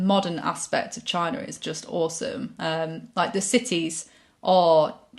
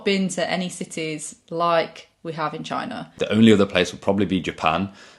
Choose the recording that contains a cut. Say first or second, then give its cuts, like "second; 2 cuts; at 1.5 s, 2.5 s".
second; 1 cut; at 3.1 s